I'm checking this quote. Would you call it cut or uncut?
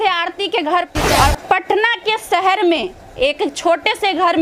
cut